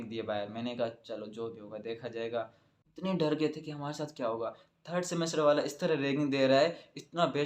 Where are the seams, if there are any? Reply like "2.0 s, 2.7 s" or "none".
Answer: 2.8 s

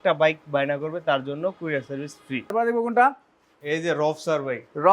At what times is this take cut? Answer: 2.5 s

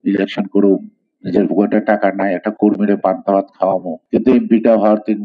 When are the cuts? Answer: 3.9 s

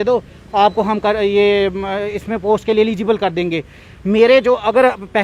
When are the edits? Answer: none

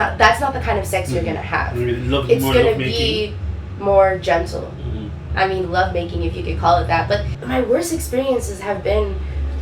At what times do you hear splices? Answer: 7.4 s

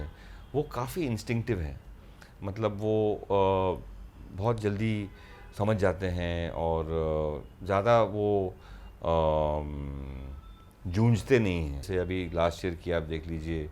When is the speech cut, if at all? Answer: 11.9 s

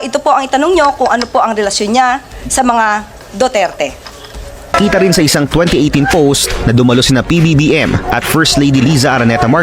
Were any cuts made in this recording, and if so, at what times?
4.6 s

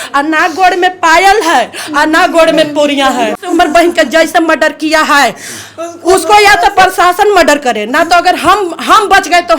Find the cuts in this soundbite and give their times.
3.4 s

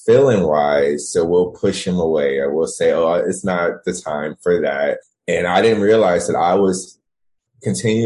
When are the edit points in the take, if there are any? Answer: 5.1 s

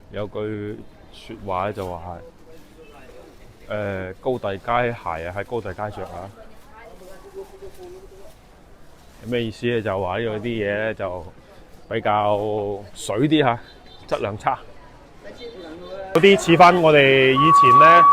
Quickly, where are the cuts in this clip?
16.2 s

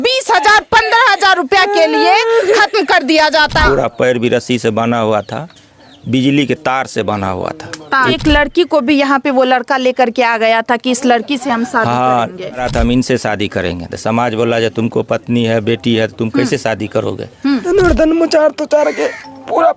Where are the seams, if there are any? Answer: 3.6 s, 8.2 s, 12.6 s, 17.7 s

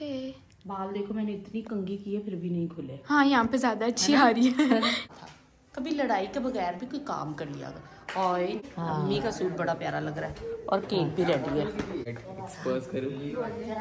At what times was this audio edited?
5.0 s, 8.6 s, 12.1 s

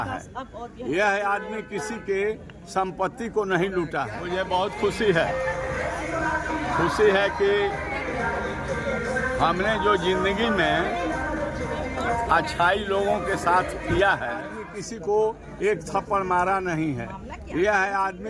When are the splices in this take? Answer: 4.2 s, 14.5 s

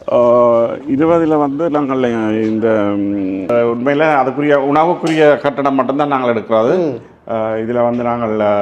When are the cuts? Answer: 3.5 s

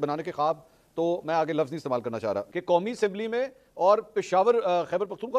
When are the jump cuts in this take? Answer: 2.5 s

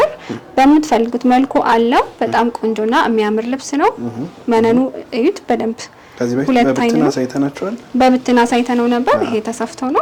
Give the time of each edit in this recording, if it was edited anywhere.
none

